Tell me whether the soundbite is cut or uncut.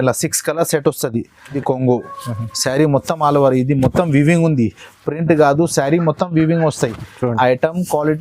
cut